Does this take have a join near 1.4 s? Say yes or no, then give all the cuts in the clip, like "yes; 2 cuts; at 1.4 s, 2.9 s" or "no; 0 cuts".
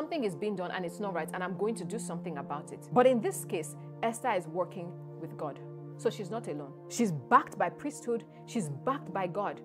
no; 2 cuts; at 2.7 s, 6.8 s